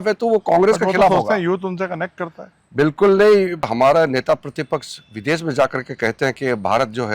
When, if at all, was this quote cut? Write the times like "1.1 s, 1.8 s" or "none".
3.7 s